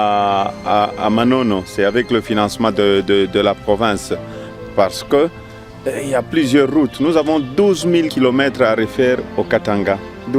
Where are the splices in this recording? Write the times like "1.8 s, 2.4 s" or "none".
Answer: 8.1 s